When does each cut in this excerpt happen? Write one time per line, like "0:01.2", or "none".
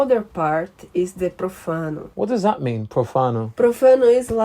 0:02.1
0:03.5